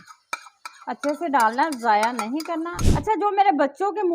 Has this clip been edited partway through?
yes; 1 cut; at 2.8 s

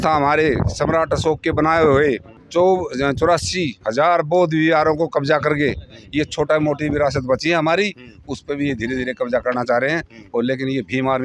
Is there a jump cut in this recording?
no; 0 cuts

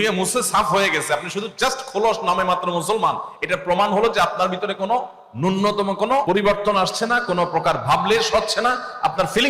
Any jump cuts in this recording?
yes; 1 cut; at 6.2 s

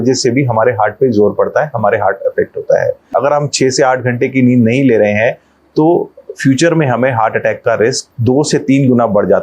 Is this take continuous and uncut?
no; 2 cuts; at 3.0 s, 8.1 s

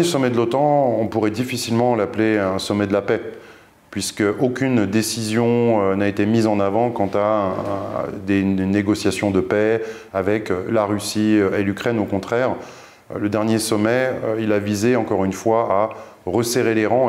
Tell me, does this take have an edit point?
no; 0 cuts

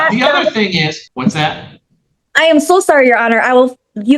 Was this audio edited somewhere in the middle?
yes; 1 cut; at 1.0 s

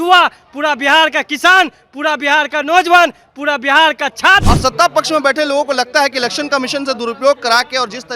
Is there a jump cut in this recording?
yes; 1 cut; at 4.5 s

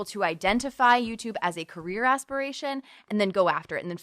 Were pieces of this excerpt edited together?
yes; 1 cut; at 3.0 s

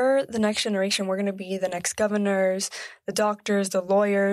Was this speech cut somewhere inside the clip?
no; 0 cuts

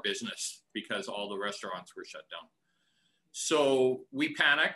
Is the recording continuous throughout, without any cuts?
yes; 0 cuts

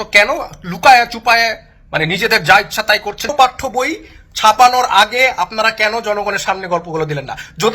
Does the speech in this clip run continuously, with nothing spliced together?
no; 1 cut; at 3.3 s

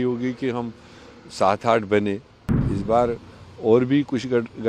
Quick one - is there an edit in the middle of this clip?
yes; 1 cut; at 2.5 s

